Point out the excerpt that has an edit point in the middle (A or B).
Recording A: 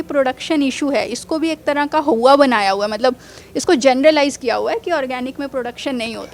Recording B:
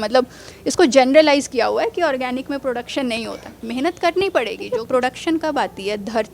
B